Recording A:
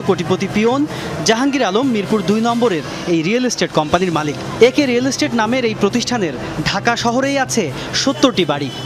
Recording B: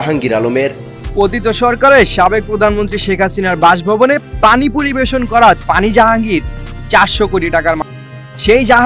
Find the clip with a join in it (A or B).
B